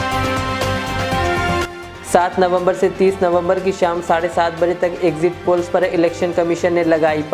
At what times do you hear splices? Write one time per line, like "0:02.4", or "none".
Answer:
0:01.6

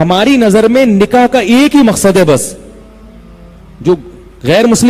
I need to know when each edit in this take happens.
none

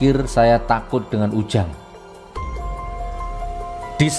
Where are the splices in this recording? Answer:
0:01.7
0:03.5

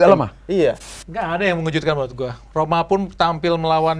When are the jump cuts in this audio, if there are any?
0:00.9

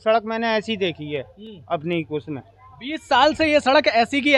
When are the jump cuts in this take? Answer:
none

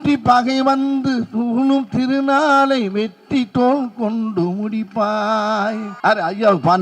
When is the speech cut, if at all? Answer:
0:05.9

